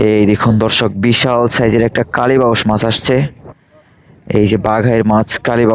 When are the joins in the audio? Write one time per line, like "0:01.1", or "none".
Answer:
none